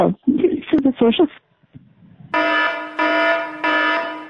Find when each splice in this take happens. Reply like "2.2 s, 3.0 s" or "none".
2.3 s